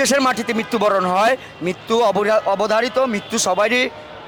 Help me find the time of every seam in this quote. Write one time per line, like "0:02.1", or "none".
none